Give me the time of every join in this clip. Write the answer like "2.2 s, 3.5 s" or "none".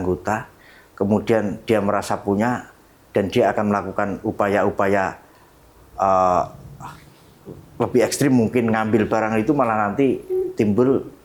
none